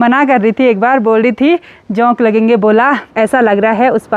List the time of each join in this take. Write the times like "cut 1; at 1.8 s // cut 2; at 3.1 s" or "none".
cut 1; at 3.1 s